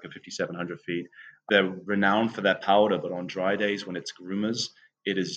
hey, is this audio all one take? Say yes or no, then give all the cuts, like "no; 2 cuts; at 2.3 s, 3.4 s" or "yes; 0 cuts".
no; 1 cut; at 1.5 s